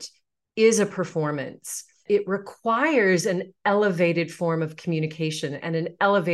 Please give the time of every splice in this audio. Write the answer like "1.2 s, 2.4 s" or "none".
2.0 s